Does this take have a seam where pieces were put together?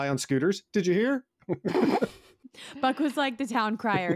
no; 0 cuts

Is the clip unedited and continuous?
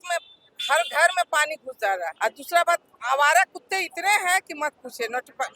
no; 1 cut; at 2.1 s

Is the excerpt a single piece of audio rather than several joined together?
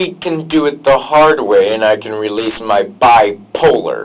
yes; 0 cuts

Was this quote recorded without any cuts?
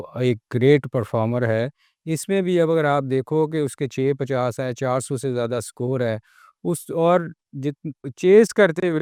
yes; 0 cuts

